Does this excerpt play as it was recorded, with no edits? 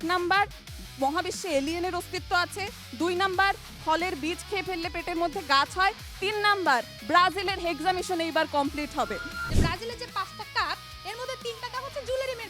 no; 1 cut; at 9.4 s

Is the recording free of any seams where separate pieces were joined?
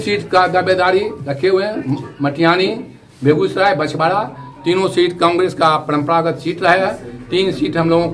yes; 0 cuts

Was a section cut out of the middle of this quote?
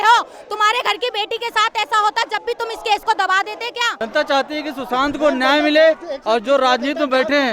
yes; 1 cut; at 3.9 s

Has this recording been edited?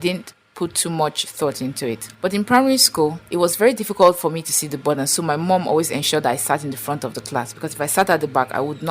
yes; 2 cuts; at 2.1 s, 3.2 s

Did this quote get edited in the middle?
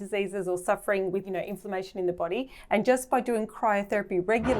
yes; 1 cut; at 1.2 s

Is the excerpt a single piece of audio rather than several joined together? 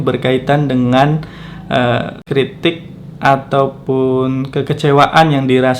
no; 1 cut; at 2.2 s

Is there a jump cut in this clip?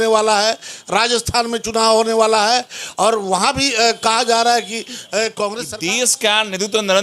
yes; 1 cut; at 5.7 s

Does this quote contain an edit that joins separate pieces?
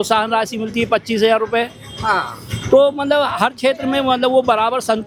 no; 0 cuts

